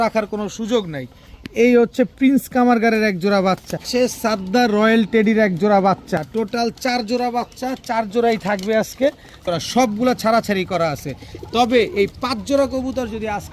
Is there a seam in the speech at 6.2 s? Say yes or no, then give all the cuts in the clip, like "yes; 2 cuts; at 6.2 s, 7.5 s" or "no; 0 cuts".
yes; 3 cuts; at 3.8 s, 6.2 s, 9.4 s